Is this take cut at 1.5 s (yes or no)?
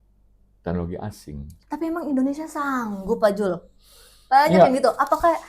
yes